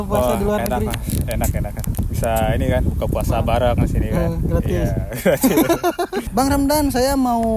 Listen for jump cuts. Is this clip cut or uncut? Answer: cut